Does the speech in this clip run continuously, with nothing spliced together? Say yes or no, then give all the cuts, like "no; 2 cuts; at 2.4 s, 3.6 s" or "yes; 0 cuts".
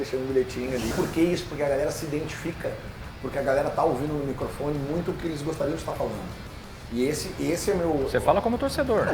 no; 1 cut; at 0.9 s